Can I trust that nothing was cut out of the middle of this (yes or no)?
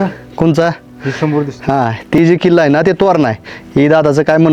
no